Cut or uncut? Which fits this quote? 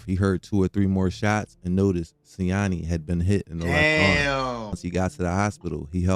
cut